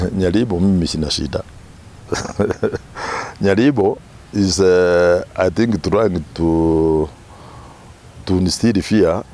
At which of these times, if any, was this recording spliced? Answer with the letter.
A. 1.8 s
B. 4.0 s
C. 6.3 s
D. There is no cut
D